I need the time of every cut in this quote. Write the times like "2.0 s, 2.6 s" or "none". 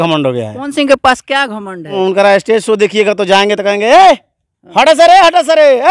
2.0 s